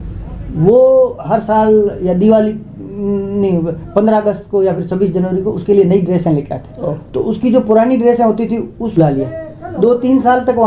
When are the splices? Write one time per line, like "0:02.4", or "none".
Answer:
0:09.0